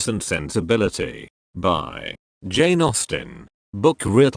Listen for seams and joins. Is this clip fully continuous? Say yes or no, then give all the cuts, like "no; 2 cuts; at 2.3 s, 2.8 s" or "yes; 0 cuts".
yes; 0 cuts